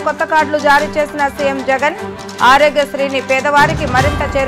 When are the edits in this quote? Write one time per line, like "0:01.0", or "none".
none

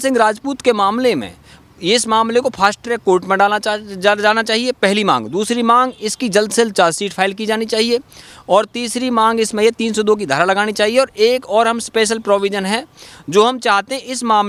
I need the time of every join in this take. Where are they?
none

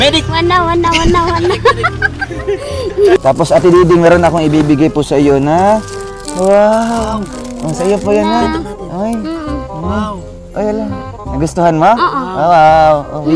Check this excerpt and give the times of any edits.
0:03.2

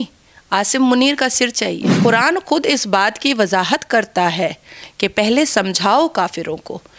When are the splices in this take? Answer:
0:01.9

